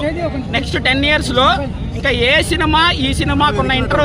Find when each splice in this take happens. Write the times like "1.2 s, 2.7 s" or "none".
none